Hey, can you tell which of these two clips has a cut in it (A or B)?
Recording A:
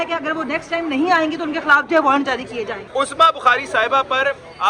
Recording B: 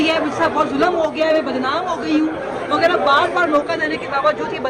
A